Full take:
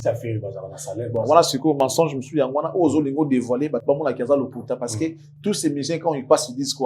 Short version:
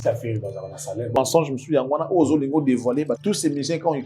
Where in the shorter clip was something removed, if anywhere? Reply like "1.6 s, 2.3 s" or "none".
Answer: 1.1 s, 3.1 s